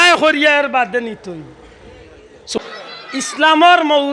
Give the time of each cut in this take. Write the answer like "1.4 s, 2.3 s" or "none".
2.4 s